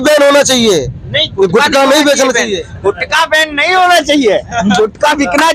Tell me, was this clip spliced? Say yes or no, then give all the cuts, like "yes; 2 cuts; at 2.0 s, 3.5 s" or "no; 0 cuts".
no; 0 cuts